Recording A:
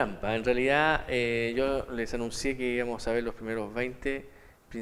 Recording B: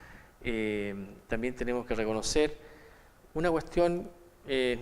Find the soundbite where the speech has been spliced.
B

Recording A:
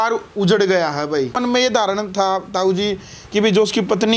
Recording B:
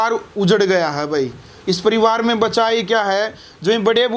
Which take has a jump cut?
A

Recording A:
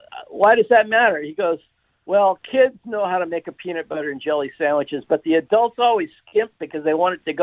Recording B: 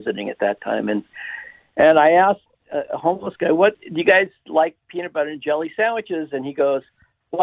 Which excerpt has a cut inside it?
B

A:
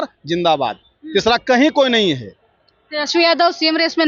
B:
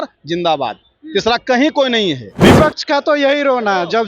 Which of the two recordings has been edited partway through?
B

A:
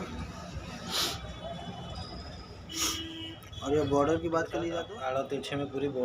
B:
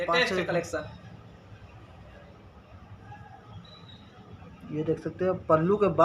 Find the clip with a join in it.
A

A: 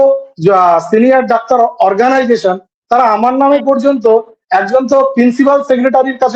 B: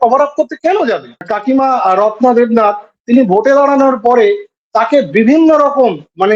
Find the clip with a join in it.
B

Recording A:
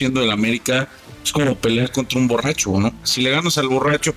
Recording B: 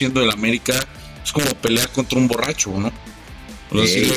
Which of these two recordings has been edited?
A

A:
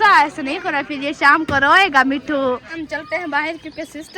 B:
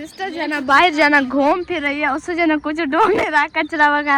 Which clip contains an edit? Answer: A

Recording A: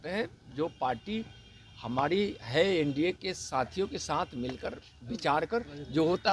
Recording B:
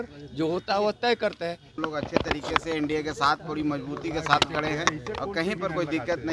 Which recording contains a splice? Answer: B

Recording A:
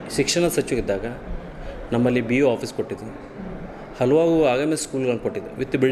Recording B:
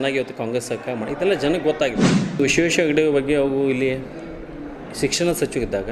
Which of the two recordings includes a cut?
B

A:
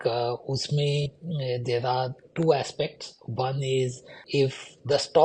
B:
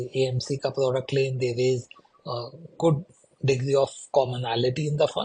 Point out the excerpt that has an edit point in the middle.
A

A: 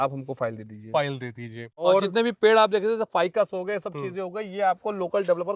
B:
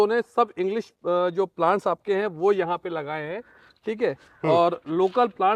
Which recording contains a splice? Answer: A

